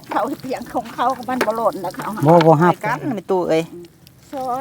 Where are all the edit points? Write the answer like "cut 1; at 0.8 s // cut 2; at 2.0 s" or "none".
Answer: cut 1; at 3.1 s